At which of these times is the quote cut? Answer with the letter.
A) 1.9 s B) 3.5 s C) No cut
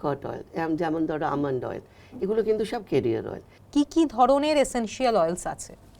B